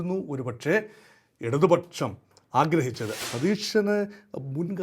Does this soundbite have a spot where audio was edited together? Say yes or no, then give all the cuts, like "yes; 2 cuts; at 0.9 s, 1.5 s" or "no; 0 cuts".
yes; 1 cut; at 3.2 s